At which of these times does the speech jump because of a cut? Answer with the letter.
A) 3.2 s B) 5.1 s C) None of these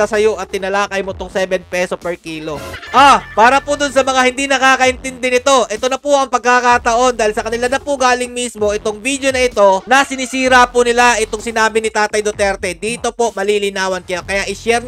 A